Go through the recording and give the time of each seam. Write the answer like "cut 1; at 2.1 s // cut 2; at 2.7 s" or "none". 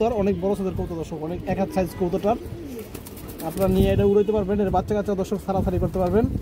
none